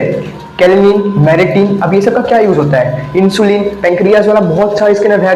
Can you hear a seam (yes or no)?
no